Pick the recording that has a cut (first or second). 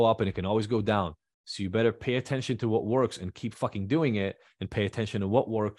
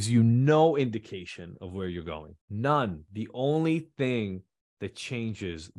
second